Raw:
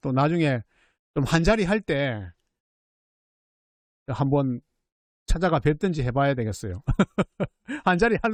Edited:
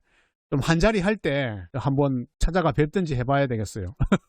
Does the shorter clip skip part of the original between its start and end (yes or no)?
yes